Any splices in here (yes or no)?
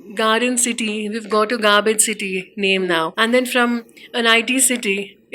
yes